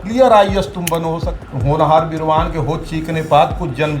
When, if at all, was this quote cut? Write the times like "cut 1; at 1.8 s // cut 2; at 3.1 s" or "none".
cut 1; at 1.3 s